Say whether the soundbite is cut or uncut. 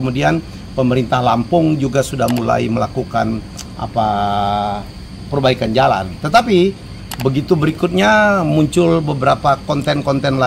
uncut